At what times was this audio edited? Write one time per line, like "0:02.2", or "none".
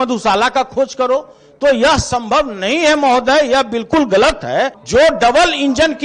none